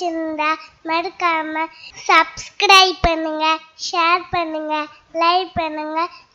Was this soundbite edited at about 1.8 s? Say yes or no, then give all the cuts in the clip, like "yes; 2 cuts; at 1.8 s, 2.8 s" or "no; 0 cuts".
no; 0 cuts